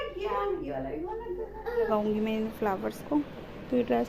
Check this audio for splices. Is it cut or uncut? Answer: cut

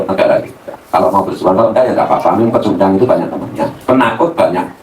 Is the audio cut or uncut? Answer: uncut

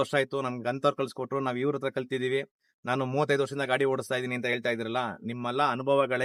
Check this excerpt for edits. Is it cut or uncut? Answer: uncut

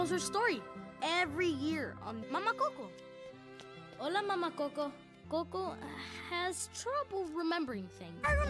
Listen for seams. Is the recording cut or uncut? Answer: cut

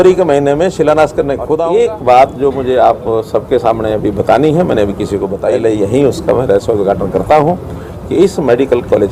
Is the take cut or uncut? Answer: cut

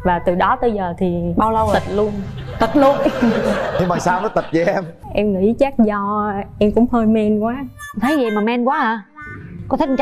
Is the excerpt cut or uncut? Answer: uncut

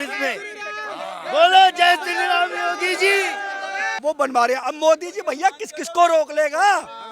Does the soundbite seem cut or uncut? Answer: cut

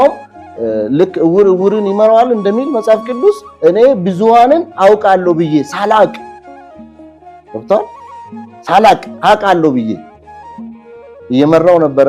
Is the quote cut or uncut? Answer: uncut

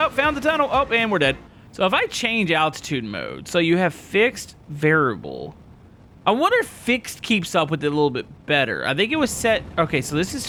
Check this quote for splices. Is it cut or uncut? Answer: uncut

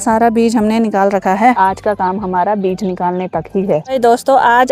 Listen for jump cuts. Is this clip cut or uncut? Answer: cut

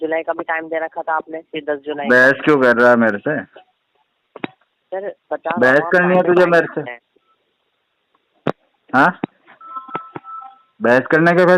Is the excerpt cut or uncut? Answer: uncut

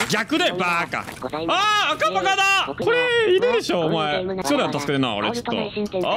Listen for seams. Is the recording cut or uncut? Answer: cut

